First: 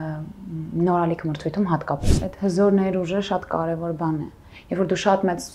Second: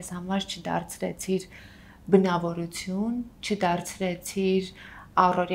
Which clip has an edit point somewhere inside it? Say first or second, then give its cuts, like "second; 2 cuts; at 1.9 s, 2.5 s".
first; 1 cut; at 2.2 s